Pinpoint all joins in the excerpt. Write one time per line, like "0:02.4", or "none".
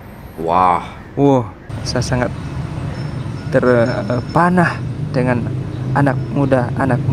0:01.7